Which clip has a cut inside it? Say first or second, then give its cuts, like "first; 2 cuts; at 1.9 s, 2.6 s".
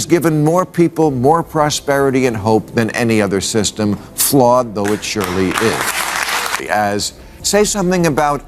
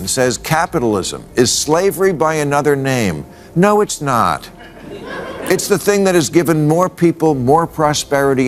first; 1 cut; at 6.3 s